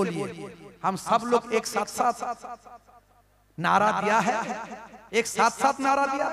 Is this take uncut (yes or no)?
yes